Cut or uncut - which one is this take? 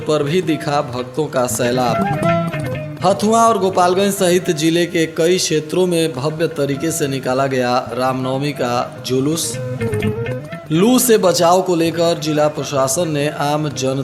uncut